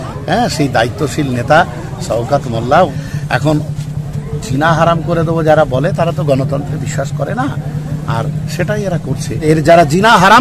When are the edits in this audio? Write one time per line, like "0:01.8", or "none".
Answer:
0:02.9
0:09.4